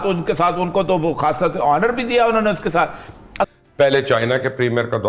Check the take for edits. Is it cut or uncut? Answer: cut